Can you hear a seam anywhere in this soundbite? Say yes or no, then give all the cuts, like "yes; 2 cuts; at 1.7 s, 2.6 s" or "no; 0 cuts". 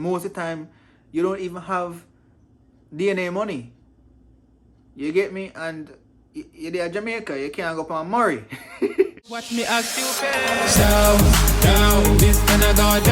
yes; 1 cut; at 9.3 s